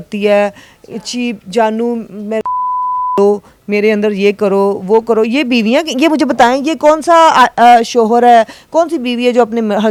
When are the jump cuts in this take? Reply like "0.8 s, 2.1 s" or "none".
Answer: none